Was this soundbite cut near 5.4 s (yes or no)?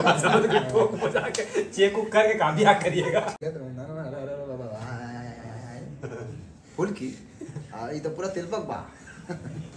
no